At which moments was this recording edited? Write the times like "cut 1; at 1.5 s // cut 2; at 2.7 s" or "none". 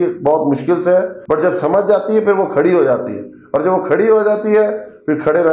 cut 1; at 1.2 s